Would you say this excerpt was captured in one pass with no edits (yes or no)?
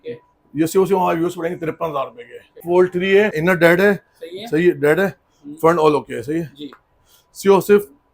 no